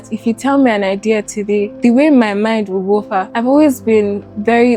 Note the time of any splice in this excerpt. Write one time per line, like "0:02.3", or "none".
0:01.7
0:03.2